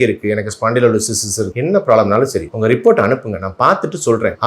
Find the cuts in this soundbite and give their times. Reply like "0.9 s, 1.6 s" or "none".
1.5 s